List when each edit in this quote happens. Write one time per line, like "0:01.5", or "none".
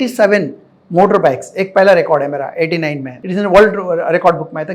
0:03.1